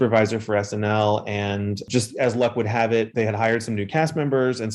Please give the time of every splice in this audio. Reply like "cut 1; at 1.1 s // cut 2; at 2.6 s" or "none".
cut 1; at 1.8 s